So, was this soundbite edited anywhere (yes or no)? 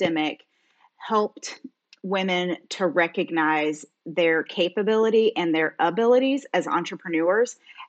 no